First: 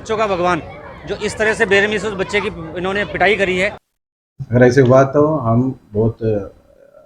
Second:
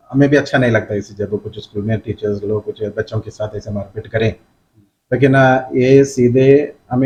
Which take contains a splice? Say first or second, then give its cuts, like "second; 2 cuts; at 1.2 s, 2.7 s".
first; 1 cut; at 3.9 s